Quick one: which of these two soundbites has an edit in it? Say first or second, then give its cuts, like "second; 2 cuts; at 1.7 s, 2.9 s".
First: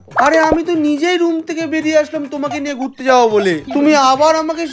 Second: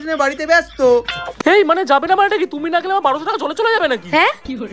second; 1 cut; at 1.2 s